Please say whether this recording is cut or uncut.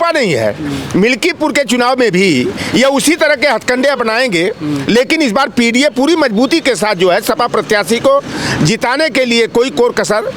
uncut